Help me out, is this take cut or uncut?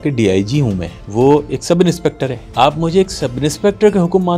cut